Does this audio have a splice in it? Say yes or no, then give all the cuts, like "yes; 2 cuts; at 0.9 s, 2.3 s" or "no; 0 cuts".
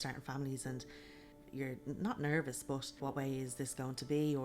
yes; 2 cuts; at 1.4 s, 3.0 s